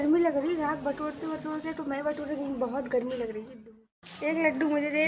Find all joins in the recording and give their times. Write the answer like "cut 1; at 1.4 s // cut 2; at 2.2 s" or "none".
cut 1; at 3.5 s